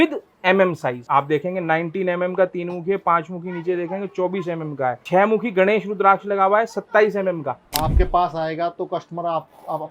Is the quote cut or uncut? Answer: cut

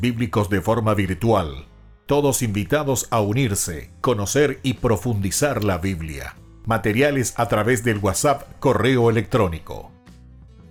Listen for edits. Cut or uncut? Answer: uncut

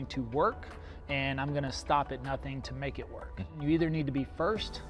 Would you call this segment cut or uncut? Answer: cut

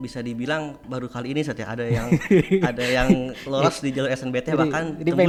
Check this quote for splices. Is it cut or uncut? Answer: uncut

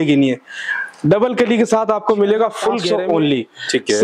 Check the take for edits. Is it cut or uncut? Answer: cut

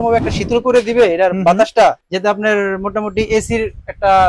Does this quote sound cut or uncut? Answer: uncut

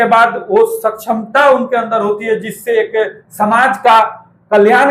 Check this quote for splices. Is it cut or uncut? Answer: uncut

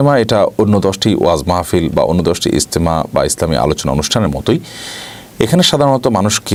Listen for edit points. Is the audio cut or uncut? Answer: uncut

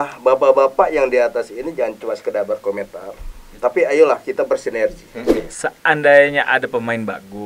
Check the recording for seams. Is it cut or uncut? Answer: cut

